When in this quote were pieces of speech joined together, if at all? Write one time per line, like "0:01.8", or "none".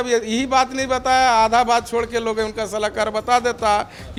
none